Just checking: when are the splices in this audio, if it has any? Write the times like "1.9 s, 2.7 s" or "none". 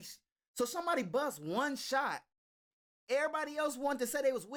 none